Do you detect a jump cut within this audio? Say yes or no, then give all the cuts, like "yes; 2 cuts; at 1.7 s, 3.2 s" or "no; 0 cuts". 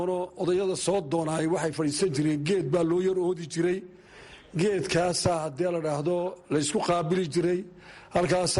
no; 0 cuts